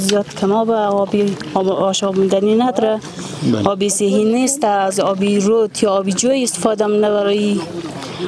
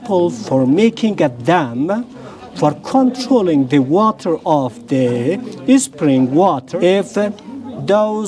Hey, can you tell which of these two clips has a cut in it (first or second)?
second